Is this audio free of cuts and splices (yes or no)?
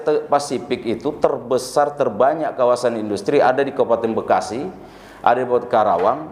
yes